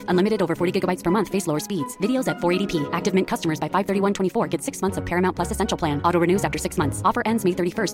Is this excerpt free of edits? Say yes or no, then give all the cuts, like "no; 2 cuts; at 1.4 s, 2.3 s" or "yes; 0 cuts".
yes; 0 cuts